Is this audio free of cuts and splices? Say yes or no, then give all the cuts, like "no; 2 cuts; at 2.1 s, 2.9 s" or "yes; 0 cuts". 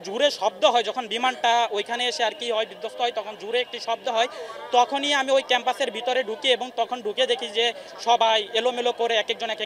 yes; 0 cuts